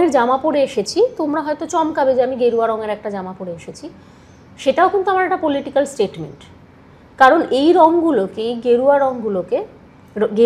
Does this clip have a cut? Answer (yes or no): no